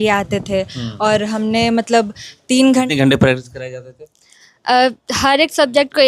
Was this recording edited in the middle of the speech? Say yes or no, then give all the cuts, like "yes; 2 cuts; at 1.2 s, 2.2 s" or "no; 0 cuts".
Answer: yes; 1 cut; at 2.8 s